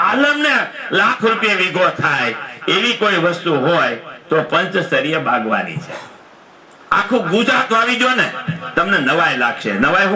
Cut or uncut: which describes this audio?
uncut